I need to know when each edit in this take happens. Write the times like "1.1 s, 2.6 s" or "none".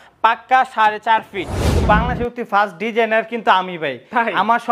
1.7 s